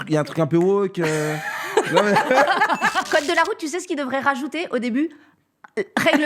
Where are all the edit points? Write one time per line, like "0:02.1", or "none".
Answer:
0:03.1